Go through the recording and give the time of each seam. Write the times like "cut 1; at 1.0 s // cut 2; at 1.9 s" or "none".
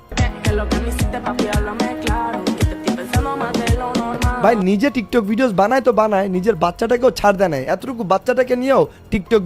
none